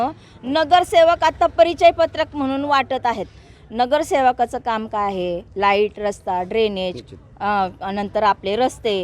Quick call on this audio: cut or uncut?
uncut